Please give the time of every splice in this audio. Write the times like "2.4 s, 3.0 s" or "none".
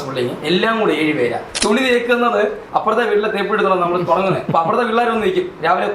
1.5 s, 2.6 s